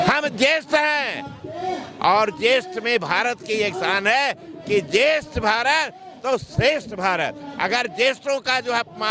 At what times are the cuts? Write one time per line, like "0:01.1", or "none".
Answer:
none

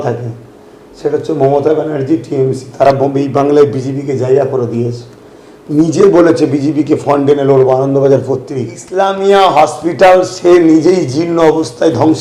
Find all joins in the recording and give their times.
0:08.8

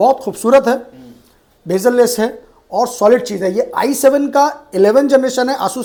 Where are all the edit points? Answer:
none

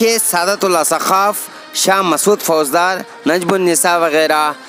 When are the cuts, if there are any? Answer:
none

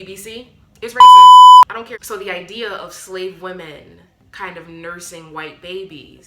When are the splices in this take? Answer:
0:02.0

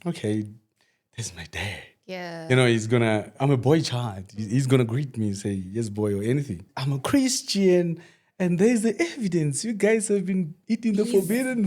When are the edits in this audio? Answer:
0:06.7

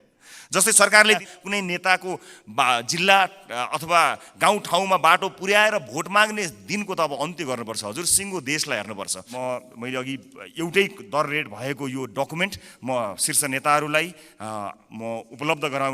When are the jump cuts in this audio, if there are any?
0:01.2
0:09.3

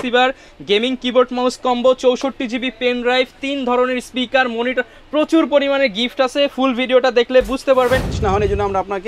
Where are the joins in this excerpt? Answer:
0:08.1

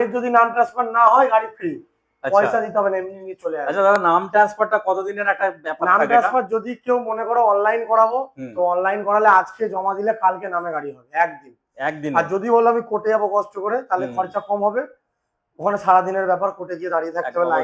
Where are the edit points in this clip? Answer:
none

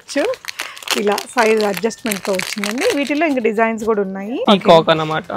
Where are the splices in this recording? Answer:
0:04.3

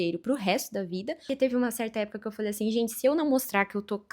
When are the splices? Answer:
0:01.3

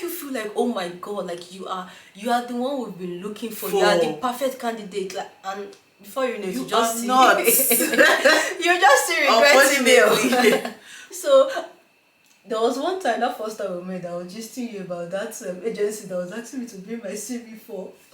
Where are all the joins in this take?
none

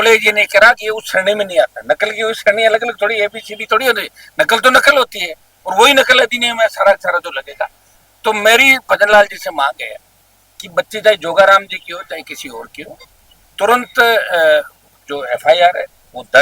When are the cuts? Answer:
none

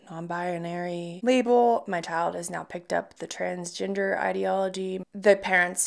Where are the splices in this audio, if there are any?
0:01.1

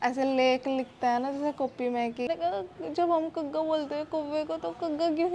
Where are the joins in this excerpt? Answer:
0:02.3

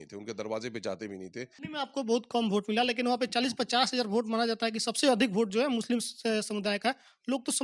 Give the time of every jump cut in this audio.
0:01.6

